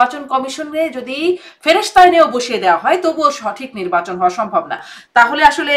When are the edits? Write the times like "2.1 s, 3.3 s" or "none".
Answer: 4.9 s